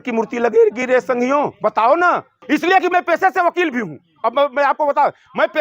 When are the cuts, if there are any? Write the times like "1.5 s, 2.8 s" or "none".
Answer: 2.4 s